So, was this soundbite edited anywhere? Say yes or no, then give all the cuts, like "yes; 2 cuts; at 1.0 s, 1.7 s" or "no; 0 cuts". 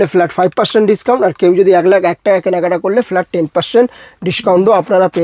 no; 0 cuts